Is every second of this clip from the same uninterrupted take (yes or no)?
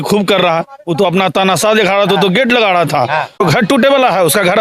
no